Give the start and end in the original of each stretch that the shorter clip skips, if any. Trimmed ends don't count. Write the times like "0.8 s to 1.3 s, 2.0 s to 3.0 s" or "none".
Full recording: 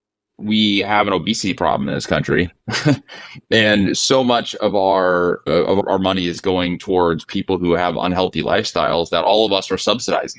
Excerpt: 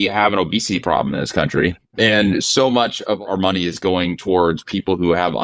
2.6 s to 3.4 s, 4.8 s to 5.8 s